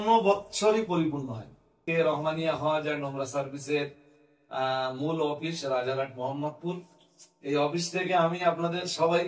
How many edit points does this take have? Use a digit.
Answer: 1